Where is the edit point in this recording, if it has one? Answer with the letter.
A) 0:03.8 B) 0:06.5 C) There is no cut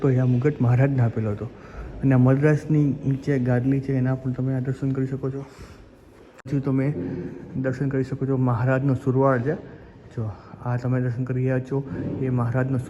B